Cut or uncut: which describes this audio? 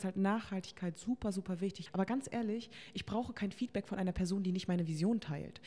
cut